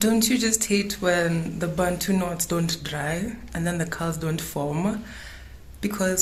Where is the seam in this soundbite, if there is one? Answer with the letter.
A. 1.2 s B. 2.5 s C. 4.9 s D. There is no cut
D